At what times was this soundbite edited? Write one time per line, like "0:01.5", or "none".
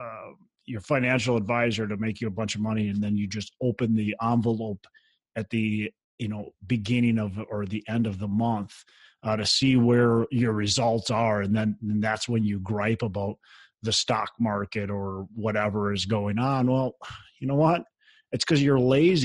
0:06.0